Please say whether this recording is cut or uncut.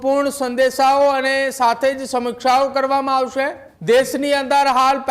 cut